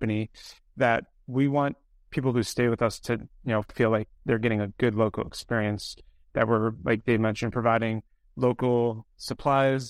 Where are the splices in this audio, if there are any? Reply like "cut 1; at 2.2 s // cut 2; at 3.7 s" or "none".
none